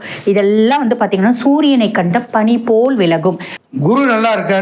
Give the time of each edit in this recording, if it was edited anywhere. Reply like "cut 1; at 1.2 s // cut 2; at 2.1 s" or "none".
cut 1; at 3.5 s